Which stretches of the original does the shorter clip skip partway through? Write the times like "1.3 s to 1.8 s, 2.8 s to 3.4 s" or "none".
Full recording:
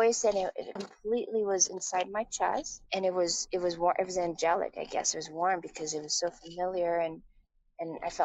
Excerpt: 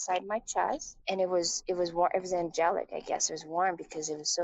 none